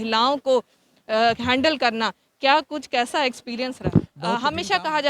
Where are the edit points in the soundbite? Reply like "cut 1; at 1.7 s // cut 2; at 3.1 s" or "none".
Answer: cut 1; at 4.2 s